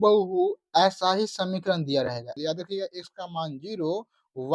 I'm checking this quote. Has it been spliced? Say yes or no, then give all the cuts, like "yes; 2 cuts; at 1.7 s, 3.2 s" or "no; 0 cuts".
yes; 1 cut; at 2.3 s